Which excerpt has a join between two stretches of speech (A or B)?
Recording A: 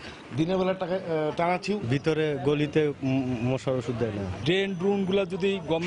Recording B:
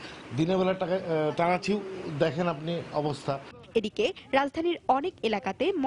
A